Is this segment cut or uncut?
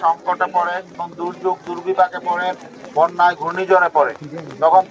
cut